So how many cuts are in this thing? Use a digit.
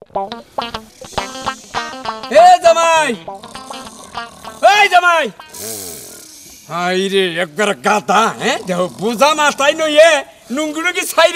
1